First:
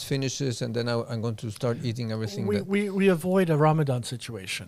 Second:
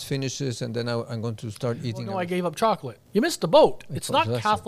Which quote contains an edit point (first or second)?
second